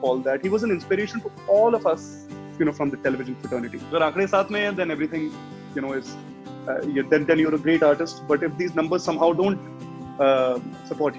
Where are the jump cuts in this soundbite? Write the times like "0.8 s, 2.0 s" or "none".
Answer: 3.9 s

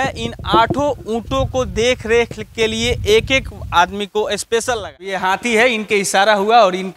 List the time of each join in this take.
5.2 s

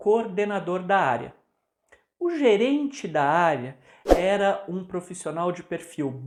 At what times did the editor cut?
none

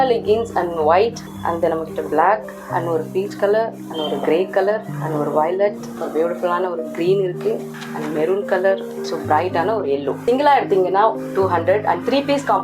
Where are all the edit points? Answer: 1.3 s, 2.5 s, 3.8 s, 4.9 s, 6.0 s, 7.7 s, 8.9 s, 10.2 s

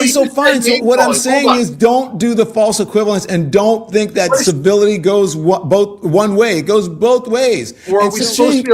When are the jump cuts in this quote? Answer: 7.7 s

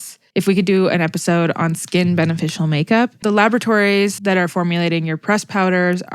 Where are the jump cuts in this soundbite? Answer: 3.2 s, 4.2 s

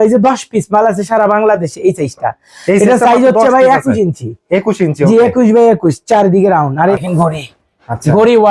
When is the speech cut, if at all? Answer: 7.0 s

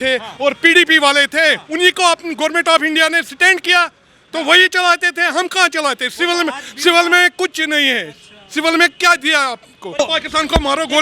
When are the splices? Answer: 10.0 s

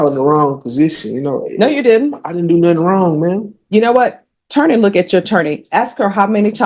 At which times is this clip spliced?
none

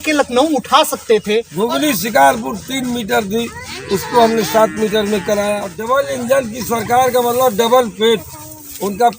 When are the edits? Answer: 1.5 s, 5.7 s

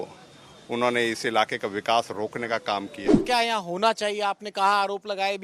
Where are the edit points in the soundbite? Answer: 3.2 s

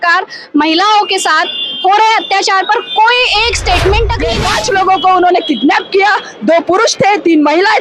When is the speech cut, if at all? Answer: 4.4 s

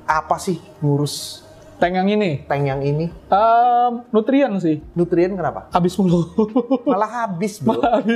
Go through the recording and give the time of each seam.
none

